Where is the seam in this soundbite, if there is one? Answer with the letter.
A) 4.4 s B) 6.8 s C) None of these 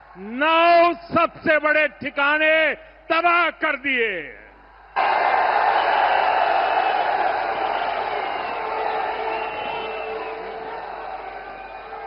C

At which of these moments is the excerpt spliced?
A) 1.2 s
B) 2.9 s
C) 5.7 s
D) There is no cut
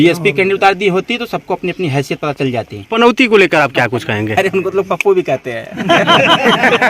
B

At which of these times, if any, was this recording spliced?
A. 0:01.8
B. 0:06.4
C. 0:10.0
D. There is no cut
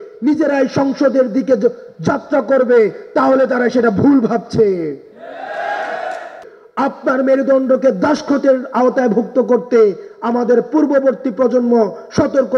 B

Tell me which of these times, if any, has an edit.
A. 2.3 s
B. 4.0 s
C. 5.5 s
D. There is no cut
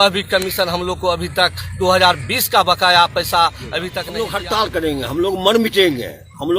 B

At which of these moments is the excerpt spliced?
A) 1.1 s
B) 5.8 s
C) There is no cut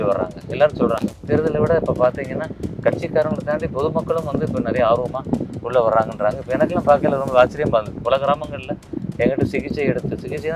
A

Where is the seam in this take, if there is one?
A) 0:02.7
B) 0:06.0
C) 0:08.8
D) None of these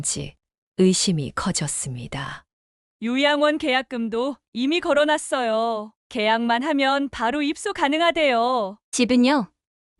C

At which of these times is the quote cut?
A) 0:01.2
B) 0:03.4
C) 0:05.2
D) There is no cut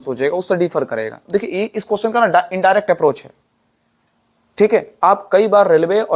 A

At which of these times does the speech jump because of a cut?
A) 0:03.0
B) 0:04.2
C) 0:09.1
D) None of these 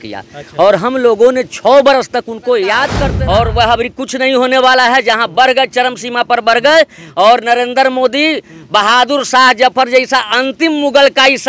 A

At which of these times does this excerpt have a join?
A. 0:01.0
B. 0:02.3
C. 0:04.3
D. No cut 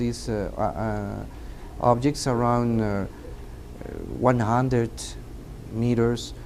D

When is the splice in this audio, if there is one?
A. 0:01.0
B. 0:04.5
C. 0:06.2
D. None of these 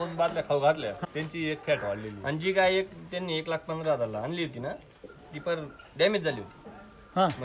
A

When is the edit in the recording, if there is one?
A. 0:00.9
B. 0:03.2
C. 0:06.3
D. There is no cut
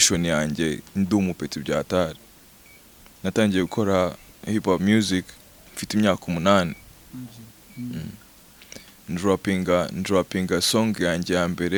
D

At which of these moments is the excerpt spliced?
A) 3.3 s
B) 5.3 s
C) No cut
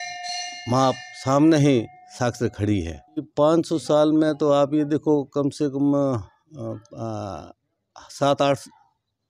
A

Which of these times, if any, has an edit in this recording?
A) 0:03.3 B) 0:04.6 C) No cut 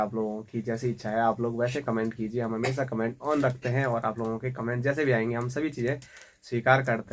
C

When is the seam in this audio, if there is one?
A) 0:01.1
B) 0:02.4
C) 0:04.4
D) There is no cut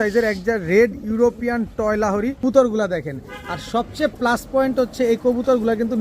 B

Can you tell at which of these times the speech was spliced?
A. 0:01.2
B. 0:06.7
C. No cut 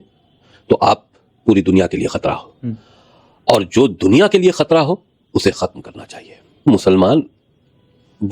B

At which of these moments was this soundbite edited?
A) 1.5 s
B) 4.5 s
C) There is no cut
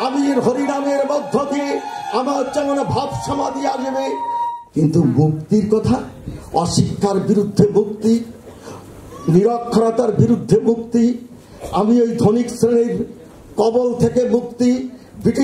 B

